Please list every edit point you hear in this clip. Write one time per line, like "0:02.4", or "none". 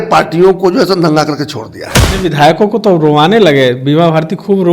0:02.1